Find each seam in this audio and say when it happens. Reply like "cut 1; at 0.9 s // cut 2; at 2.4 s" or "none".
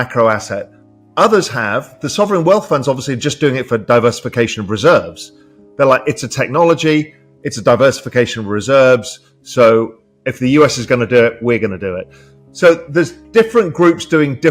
cut 1; at 13.2 s